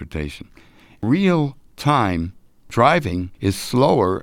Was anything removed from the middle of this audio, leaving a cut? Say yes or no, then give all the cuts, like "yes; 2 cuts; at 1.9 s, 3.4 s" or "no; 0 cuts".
yes; 3 cuts; at 1.0 s, 2.7 s, 3.3 s